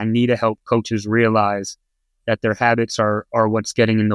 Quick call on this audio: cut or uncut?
uncut